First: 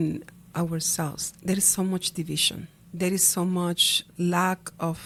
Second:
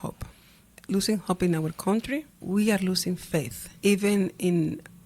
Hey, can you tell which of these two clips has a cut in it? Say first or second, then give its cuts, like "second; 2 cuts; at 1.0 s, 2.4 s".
second; 2 cuts; at 2.3 s, 3.6 s